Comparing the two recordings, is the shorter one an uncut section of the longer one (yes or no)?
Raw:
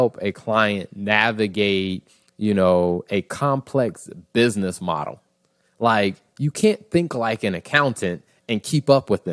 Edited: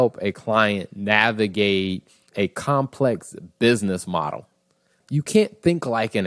no